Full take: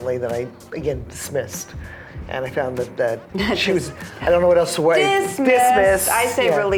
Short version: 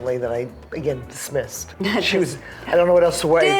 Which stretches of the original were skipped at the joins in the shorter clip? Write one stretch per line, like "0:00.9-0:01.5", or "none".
0:01.7-0:03.3